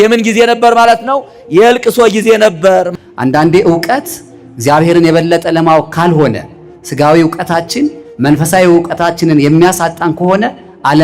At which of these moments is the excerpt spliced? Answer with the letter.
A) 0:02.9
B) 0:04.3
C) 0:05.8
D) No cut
A